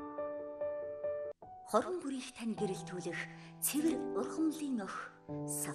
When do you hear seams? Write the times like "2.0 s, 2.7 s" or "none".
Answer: 1.3 s